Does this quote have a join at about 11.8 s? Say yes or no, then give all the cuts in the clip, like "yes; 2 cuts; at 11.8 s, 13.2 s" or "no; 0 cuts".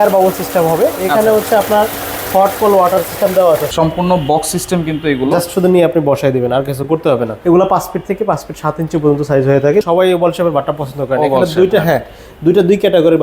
no; 3 cuts; at 3.7 s, 7.4 s, 9.9 s